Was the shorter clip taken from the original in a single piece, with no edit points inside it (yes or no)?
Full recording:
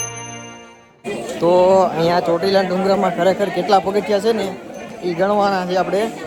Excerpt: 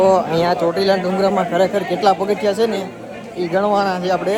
yes